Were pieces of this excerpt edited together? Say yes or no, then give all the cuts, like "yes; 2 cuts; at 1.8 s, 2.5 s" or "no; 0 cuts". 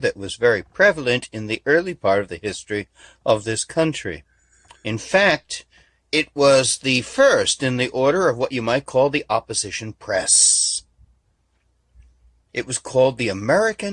yes; 1 cut; at 8.1 s